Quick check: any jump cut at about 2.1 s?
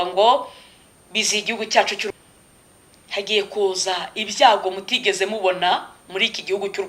yes; 1 cut; at 2.1 s

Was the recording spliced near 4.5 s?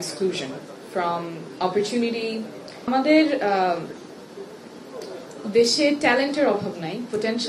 no; 1 cut; at 2.9 s

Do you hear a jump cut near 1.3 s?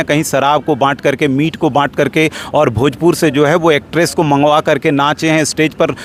no; 0 cuts

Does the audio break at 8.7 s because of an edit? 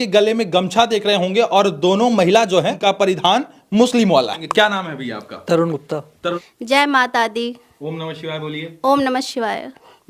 no; 1 cut; at 6.4 s

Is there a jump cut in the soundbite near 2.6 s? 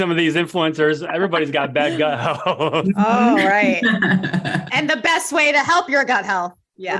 no; 0 cuts

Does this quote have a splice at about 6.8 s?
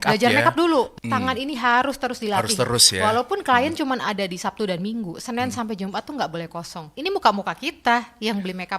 yes; 2 cuts; at 1.0 s, 6.8 s

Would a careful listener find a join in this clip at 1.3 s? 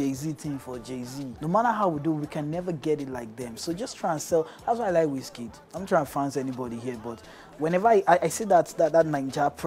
yes; 1 cut; at 1.3 s

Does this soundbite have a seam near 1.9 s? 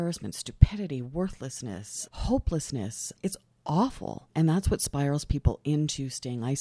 yes; 2 cuts; at 1.9 s, 3.0 s

